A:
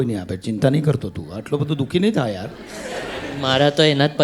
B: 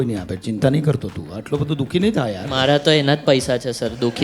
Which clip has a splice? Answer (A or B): B